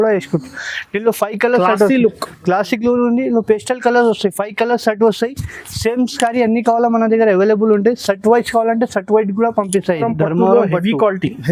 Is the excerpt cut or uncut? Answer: cut